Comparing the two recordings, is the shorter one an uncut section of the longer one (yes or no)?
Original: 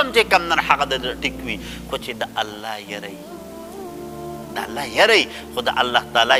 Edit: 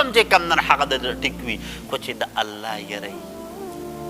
no